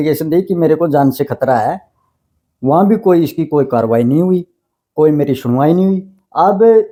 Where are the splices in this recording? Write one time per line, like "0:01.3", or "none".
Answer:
none